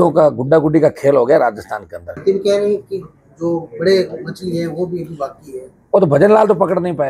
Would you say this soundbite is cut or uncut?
cut